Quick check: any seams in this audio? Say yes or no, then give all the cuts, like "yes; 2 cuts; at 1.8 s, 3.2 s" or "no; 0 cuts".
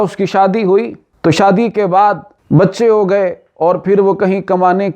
yes; 2 cuts; at 1.0 s, 2.3 s